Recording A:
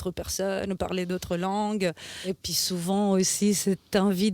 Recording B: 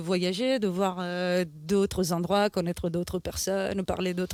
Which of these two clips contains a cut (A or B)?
A